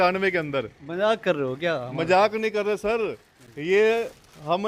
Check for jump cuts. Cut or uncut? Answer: uncut